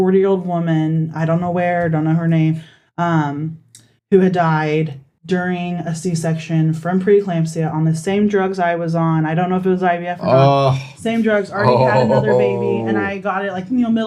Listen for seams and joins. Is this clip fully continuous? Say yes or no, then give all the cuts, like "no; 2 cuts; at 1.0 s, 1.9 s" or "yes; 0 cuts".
yes; 0 cuts